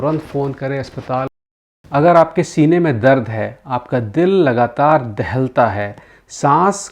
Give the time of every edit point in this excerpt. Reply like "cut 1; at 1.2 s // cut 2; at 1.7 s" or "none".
cut 1; at 1.8 s